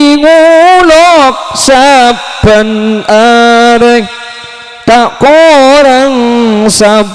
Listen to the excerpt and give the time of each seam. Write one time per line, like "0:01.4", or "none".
none